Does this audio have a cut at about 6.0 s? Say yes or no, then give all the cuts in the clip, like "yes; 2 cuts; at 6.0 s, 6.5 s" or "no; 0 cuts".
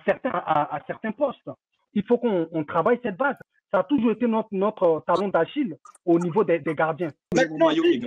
no; 3 cuts; at 1.7 s, 3.4 s, 7.3 s